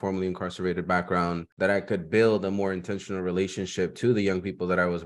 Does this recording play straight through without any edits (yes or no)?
no